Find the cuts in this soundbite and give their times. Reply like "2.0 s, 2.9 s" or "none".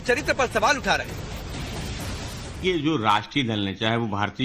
3.3 s